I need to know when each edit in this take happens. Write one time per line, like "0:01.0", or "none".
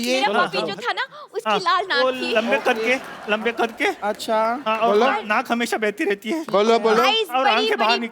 none

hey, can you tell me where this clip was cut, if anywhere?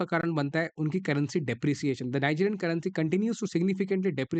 none

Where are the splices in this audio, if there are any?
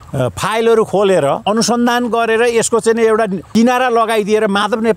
0:01.4
0:03.4

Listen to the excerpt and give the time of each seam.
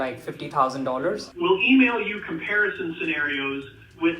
0:01.3

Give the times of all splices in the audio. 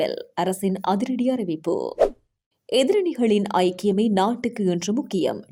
none

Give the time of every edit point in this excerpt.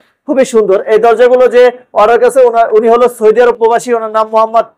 none

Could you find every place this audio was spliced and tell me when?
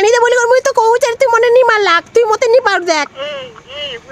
none

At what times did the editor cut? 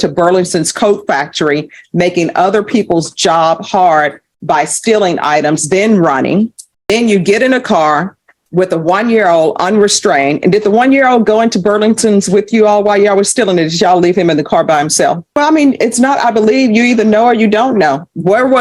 0:06.7
0:15.4

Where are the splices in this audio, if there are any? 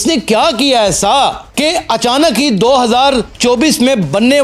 none

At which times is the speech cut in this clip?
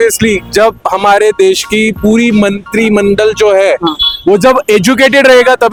none

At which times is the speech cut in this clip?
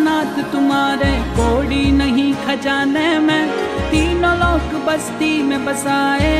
none

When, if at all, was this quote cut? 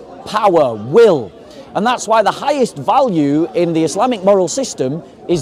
none

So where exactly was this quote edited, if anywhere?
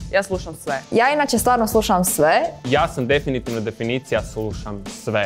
0:02.6

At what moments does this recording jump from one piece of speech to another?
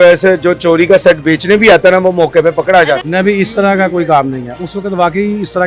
0:03.0

